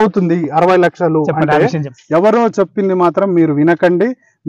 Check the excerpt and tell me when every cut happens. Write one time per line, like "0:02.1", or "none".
0:01.9